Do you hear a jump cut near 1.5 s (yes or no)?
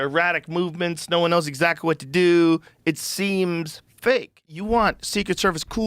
no